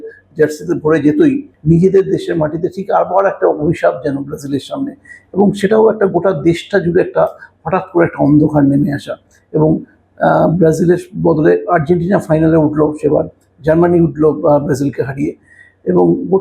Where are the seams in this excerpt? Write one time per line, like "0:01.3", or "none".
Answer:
0:01.5